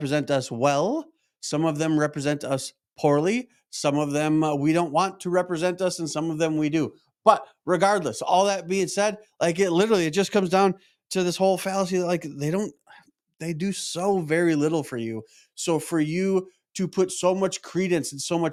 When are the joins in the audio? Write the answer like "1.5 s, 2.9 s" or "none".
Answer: none